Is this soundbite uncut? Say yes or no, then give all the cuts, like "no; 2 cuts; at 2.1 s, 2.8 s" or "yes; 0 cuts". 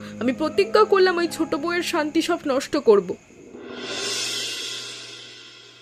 yes; 0 cuts